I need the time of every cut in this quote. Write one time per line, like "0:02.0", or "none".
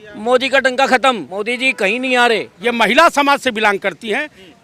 0:01.3
0:02.5